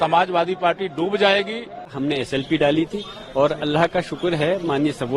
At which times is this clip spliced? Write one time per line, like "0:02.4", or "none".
0:01.9